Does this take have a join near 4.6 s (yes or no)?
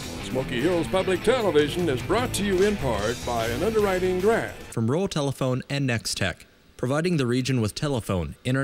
yes